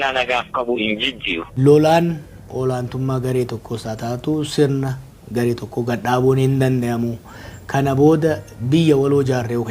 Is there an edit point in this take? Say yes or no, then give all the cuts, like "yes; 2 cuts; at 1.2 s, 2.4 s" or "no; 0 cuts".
yes; 1 cut; at 1.5 s